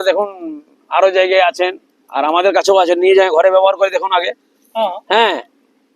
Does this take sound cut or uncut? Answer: uncut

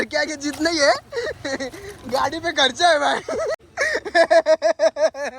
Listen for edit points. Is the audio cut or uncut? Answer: cut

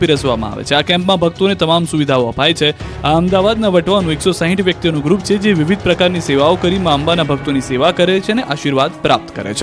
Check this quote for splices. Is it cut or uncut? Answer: cut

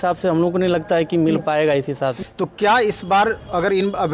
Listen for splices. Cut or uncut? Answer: cut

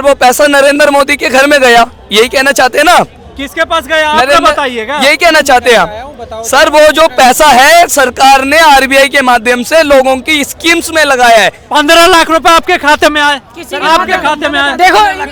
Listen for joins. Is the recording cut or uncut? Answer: uncut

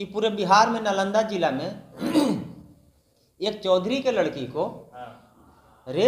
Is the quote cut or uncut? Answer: uncut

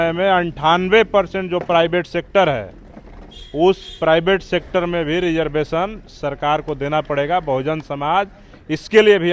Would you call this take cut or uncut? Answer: uncut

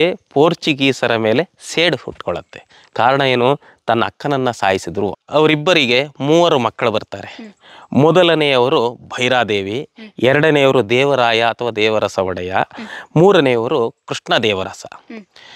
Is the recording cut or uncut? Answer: cut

